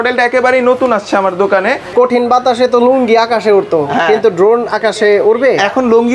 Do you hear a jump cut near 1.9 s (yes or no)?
yes